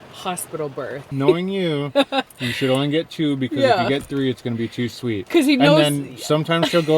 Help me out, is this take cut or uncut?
cut